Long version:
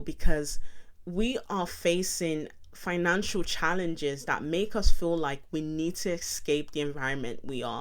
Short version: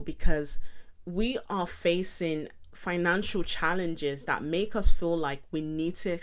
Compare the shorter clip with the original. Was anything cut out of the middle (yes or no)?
no